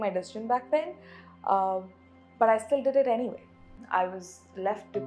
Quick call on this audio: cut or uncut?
cut